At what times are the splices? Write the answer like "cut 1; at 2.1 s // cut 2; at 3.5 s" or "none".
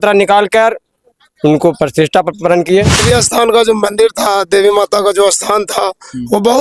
cut 1; at 3.0 s